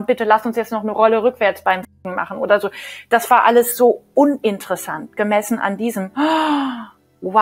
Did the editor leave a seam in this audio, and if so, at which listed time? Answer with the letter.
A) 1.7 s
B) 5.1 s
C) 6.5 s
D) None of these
D